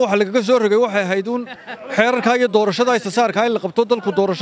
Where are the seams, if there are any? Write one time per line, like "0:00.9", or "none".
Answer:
none